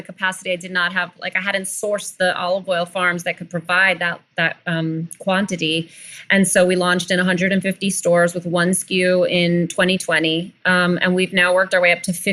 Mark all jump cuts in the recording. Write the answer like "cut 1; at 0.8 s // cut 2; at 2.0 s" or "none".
none